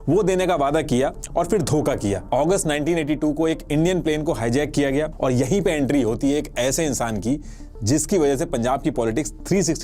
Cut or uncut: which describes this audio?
cut